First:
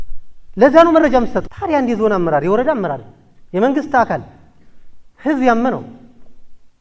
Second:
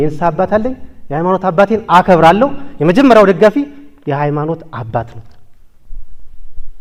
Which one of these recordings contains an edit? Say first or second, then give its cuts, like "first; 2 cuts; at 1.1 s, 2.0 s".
first; 1 cut; at 1.4 s